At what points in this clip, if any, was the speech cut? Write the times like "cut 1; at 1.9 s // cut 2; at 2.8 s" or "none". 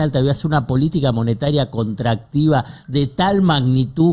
none